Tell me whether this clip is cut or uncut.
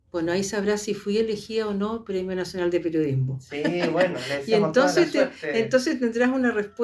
uncut